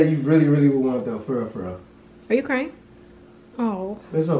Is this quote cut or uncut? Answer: uncut